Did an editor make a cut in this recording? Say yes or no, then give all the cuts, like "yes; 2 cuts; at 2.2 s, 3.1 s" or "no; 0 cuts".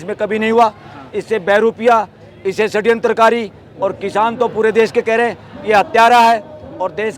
no; 0 cuts